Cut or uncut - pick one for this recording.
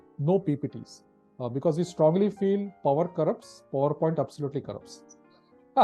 uncut